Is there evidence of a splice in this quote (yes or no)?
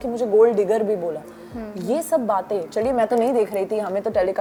no